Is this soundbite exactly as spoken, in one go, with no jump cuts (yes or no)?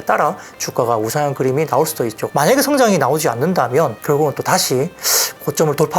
no